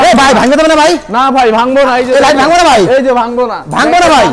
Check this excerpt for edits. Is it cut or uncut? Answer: uncut